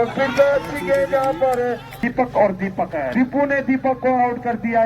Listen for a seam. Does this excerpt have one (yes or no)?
yes